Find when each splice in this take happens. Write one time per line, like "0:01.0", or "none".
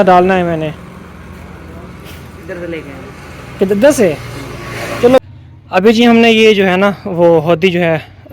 0:05.2

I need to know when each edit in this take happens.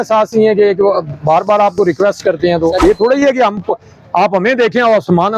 0:02.8

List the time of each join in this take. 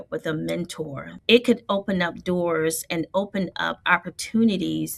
0:01.1

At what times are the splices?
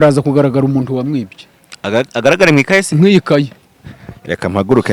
none

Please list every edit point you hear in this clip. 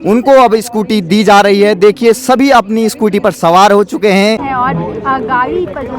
0:04.4

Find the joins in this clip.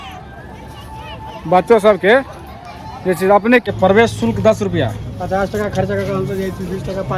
0:03.7

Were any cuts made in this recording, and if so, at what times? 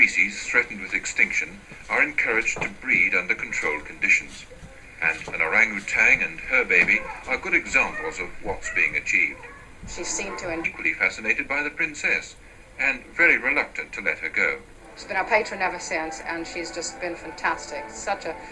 none

